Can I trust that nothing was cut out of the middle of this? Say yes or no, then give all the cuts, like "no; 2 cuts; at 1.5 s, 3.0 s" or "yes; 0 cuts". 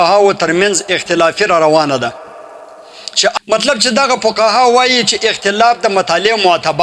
no; 1 cut; at 3.3 s